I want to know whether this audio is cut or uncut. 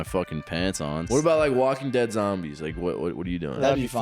cut